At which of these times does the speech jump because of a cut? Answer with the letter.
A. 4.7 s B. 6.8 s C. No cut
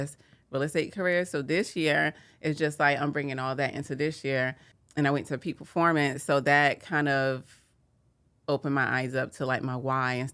A